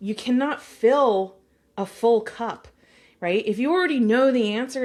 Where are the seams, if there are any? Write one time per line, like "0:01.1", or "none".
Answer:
none